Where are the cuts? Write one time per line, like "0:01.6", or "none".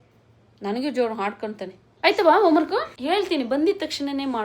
0:01.8